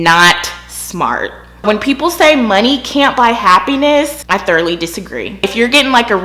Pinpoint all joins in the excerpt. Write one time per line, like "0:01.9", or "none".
0:01.6
0:05.4